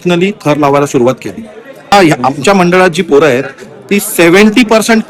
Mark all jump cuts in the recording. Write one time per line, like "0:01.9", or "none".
0:01.9